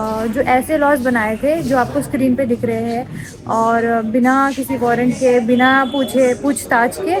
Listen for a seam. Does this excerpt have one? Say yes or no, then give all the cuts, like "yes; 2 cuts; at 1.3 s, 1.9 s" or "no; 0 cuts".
no; 0 cuts